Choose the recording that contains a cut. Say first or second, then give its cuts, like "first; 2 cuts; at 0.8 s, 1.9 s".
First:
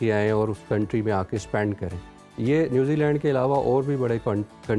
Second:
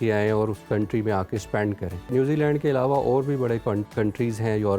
second; 2 cuts; at 2.1 s, 3.9 s